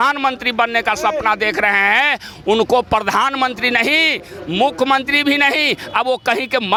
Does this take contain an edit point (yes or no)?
no